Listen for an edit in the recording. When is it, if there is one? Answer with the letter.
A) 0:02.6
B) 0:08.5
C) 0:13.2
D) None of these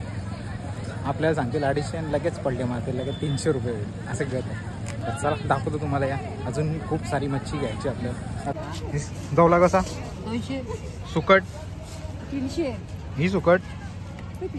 B